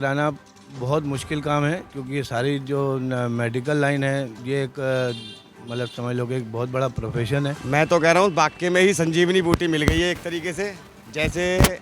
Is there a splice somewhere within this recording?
yes; 3 cuts; at 1.9 s, 4.4 s, 7.6 s

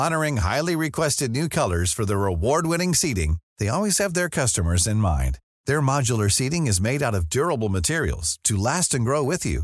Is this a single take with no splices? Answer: yes; 0 cuts

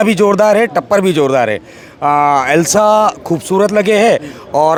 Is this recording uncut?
yes; 0 cuts

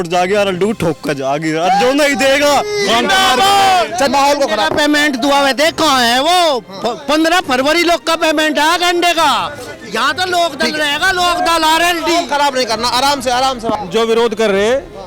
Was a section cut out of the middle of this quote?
yes; 2 cuts; at 4.1 s, 13.7 s

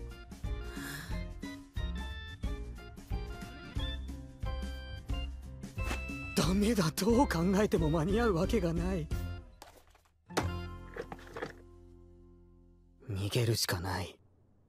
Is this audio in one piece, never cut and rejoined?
no; 1 cut; at 2.9 s

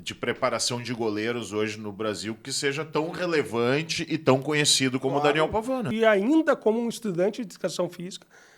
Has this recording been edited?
yes; 1 cut; at 5.9 s

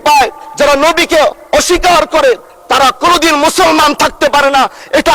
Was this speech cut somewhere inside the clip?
no; 0 cuts

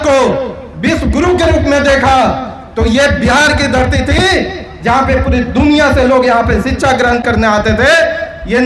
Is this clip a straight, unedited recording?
yes; 0 cuts

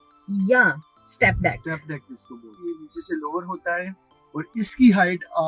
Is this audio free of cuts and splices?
no; 1 cut; at 2.6 s

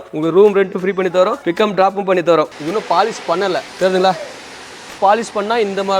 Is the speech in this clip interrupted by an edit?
yes; 3 cuts; at 2.5 s, 3.7 s, 4.9 s

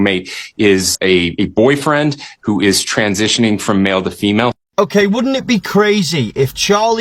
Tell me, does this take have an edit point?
yes; 2 cuts; at 0.9 s, 4.6 s

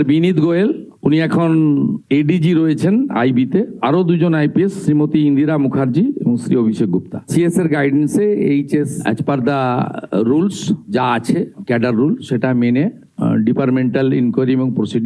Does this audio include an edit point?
no; 0 cuts

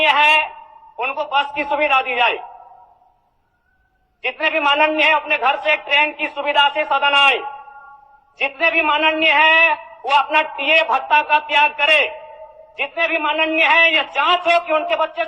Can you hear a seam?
no; 0 cuts

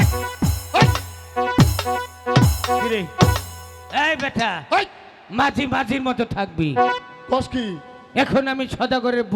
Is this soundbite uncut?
yes; 0 cuts

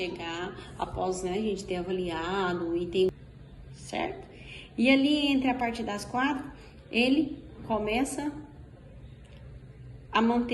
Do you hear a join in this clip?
yes; 1 cut; at 3.1 s

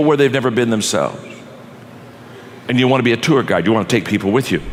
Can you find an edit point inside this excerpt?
no; 0 cuts

